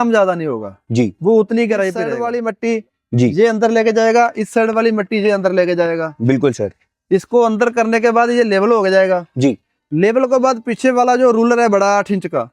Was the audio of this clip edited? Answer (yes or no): yes